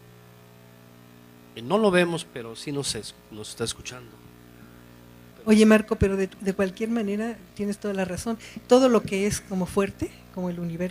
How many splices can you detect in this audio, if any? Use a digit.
1